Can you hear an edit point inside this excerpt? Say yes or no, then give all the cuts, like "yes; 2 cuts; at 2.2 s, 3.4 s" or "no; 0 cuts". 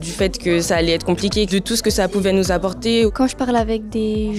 yes; 2 cuts; at 1.7 s, 3.1 s